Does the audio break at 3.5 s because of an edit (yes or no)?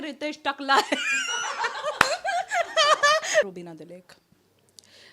yes